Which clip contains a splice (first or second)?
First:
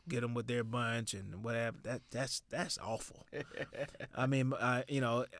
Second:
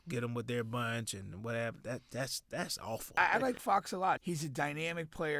second